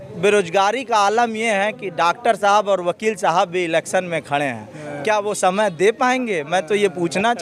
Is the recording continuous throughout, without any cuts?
yes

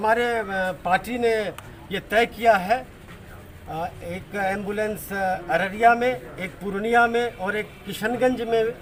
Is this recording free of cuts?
yes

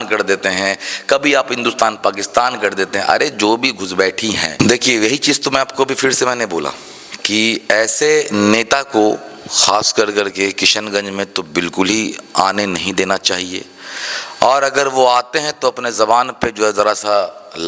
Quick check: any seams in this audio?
yes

